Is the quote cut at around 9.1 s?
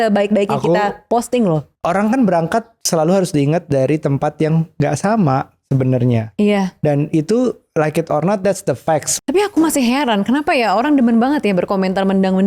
yes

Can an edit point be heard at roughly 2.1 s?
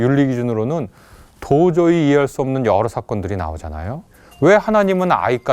no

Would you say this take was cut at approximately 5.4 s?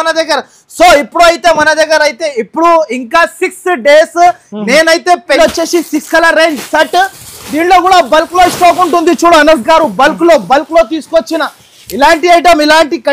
yes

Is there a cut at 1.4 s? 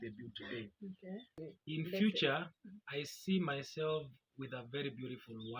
yes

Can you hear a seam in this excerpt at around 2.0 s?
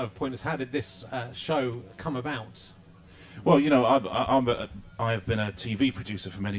no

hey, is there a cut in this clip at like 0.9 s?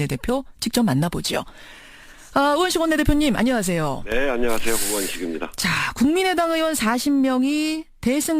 yes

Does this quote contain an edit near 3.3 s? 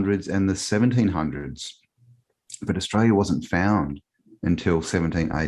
no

